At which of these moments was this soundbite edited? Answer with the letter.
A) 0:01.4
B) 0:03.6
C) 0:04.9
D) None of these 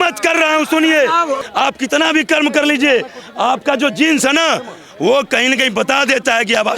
A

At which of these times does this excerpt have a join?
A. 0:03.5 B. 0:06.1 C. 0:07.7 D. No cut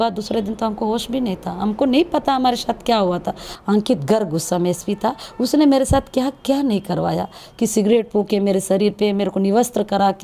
A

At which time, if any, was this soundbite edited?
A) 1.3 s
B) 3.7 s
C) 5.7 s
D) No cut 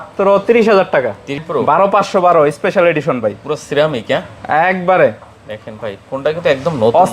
A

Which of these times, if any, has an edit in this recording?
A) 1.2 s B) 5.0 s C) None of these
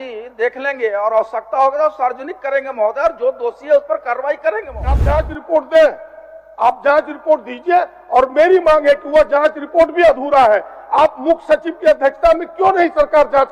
B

